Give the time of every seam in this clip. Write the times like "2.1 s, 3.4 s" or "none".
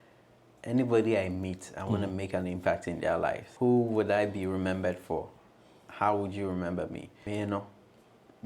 3.5 s, 7.1 s